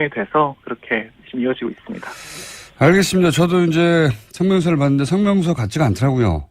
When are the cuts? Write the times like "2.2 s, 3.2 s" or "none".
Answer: none